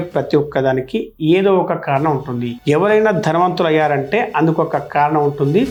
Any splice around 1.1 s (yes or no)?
no